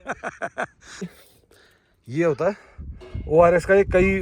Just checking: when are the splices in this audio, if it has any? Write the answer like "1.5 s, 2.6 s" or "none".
1.1 s